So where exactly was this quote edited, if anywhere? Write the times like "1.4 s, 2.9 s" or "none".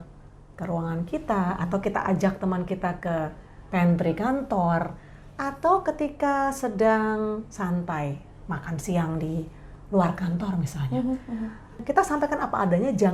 11.8 s